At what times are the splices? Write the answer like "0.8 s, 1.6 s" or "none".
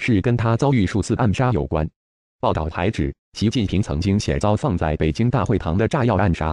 none